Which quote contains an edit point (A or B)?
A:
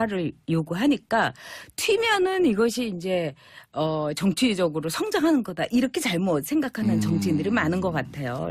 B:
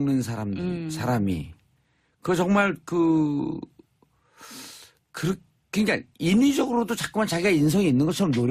B